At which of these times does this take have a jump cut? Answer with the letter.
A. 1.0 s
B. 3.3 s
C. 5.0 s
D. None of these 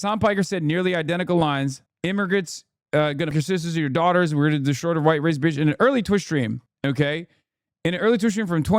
B